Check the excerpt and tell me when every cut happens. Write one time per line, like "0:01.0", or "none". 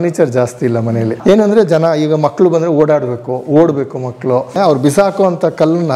0:01.2
0:04.5